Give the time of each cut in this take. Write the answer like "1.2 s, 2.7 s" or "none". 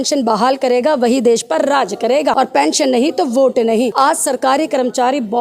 2.3 s, 3.9 s